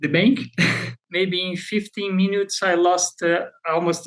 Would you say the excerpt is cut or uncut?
cut